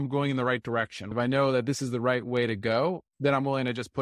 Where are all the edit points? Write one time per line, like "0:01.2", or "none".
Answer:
0:01.0
0:03.1